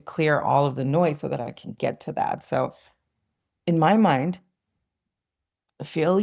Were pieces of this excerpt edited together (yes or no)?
no